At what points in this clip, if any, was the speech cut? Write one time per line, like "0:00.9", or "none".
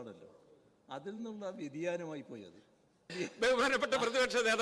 0:03.1